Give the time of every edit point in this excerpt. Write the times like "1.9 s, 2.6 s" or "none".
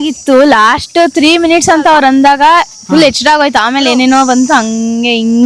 none